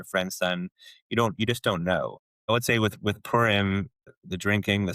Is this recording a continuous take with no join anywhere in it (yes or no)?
no